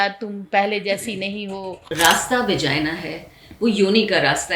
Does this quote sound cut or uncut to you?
cut